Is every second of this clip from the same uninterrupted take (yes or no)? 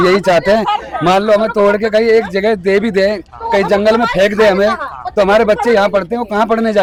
yes